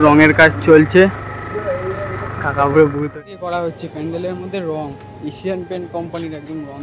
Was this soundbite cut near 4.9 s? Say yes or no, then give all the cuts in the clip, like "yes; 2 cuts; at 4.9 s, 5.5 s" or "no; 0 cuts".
no; 1 cut; at 3.1 s